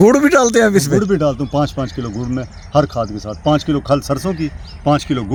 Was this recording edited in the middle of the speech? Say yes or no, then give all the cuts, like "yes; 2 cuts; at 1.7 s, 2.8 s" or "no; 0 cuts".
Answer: no; 0 cuts